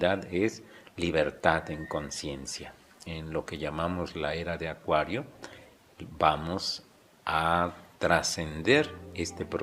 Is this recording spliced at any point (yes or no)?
yes